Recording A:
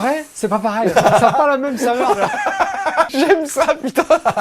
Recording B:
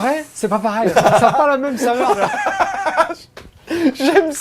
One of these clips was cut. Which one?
A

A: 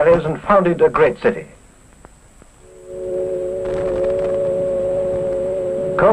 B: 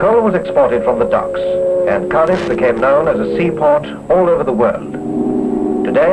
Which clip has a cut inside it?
B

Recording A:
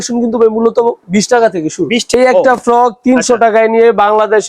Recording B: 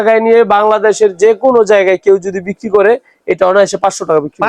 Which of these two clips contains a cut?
A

